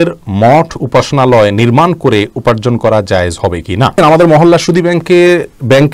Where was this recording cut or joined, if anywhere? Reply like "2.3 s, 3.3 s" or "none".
3.9 s

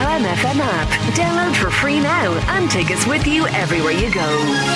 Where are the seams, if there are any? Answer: none

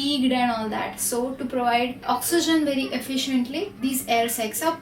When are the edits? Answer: none

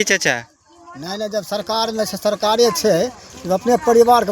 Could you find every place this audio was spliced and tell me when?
none

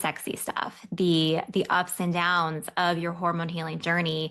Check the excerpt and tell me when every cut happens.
none

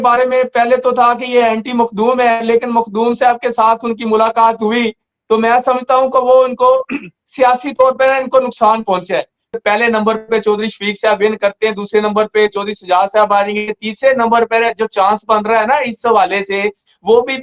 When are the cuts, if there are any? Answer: 9.6 s

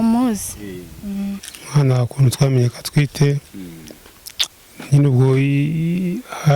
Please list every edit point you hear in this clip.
1.5 s

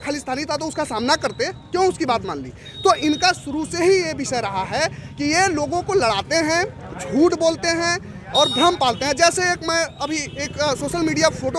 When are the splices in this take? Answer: none

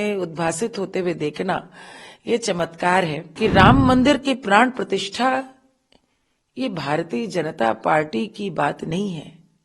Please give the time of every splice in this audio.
3.3 s

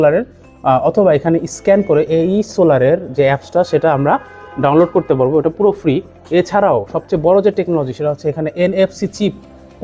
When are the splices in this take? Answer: none

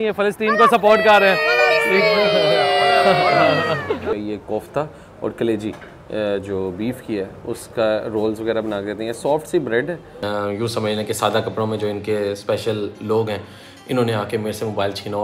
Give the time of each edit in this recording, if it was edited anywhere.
4.1 s, 10.2 s

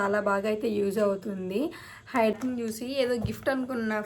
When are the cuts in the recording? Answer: 2.4 s

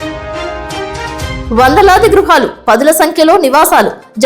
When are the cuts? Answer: 1.4 s

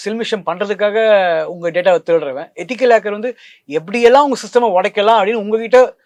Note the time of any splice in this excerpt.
none

